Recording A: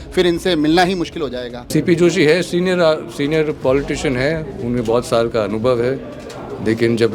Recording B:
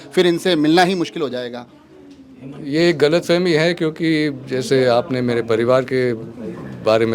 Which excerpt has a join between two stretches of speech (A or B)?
A